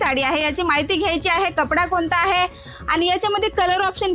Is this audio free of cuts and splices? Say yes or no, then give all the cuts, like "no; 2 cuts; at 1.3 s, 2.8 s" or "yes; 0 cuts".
yes; 0 cuts